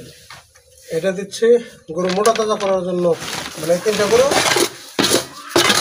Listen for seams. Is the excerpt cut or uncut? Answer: cut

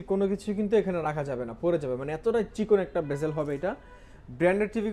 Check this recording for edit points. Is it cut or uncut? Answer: uncut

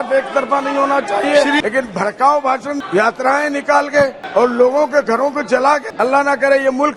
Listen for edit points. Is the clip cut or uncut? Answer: cut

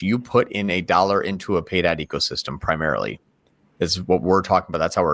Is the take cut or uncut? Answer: uncut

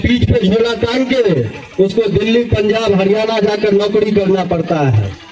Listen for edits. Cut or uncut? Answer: uncut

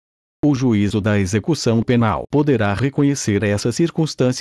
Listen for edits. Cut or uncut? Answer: cut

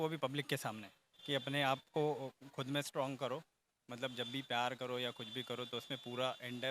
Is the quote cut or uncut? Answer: cut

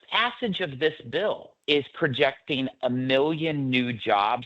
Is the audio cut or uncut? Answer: cut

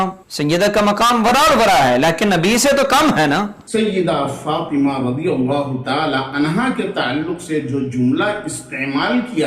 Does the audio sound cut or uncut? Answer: cut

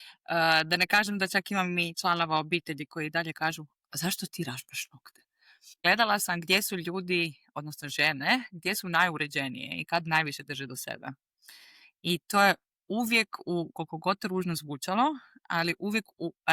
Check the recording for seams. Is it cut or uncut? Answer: cut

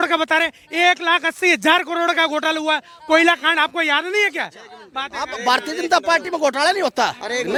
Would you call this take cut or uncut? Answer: uncut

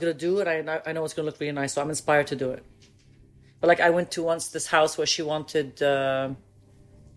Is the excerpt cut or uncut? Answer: uncut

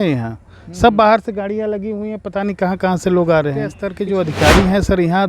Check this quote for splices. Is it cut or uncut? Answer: cut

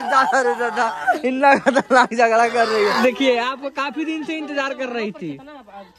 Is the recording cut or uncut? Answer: cut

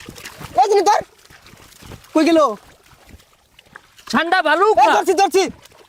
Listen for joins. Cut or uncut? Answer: uncut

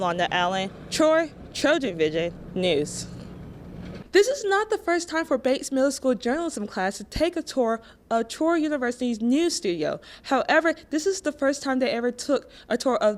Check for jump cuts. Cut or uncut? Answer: cut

